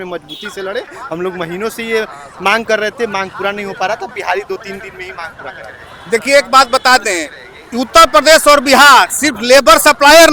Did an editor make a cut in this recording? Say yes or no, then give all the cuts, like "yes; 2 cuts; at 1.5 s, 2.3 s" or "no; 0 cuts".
no; 0 cuts